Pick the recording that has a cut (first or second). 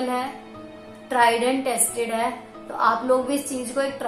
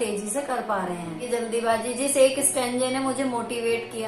second